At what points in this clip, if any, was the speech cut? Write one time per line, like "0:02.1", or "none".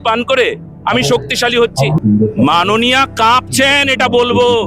0:02.0